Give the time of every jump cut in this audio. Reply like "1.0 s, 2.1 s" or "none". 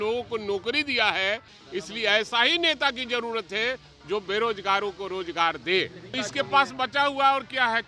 1.5 s, 6.1 s